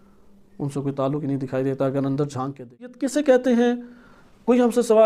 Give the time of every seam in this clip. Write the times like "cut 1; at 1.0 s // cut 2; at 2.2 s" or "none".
cut 1; at 3.0 s